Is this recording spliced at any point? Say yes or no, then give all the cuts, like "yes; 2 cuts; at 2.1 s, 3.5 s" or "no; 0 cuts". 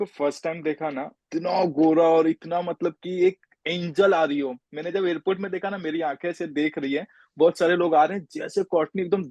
yes; 1 cut; at 1.2 s